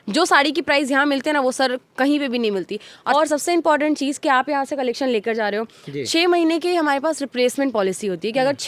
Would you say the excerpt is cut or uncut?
cut